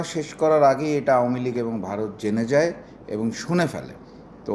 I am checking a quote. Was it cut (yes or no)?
no